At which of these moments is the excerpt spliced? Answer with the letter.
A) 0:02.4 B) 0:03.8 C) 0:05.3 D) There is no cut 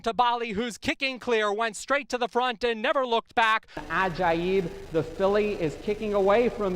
B